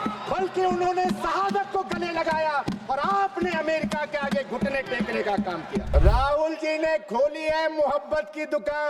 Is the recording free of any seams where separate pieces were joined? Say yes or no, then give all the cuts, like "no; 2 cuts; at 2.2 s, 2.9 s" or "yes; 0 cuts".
no; 1 cut; at 5.9 s